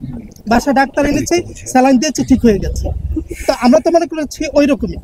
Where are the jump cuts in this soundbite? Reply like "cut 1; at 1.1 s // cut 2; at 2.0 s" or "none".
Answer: none